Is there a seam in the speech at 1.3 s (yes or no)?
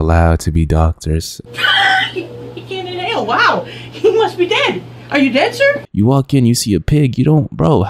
yes